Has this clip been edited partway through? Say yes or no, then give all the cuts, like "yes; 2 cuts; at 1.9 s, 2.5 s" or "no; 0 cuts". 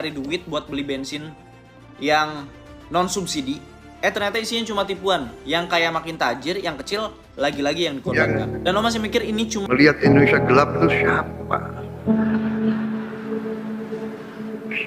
yes; 1 cut; at 9.6 s